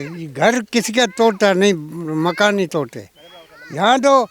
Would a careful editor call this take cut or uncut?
uncut